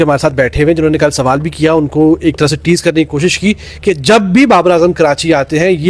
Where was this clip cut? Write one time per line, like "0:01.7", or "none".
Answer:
none